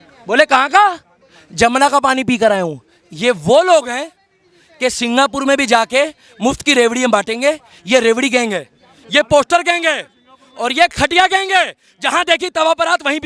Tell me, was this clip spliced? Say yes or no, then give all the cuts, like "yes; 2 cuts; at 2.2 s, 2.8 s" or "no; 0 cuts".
no; 0 cuts